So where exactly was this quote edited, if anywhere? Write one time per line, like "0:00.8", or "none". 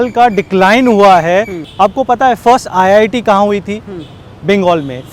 0:01.6